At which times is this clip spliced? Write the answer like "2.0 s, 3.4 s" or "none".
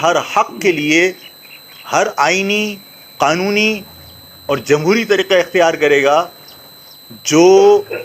none